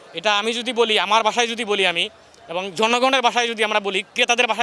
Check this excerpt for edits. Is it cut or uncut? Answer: uncut